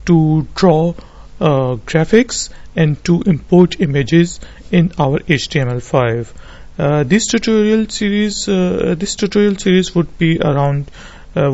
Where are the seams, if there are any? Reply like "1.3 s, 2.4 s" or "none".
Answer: 1.2 s